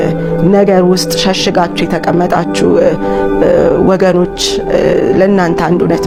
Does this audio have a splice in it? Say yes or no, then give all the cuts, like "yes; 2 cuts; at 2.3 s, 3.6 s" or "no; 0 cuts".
no; 0 cuts